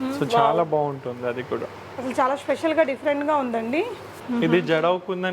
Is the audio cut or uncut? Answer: cut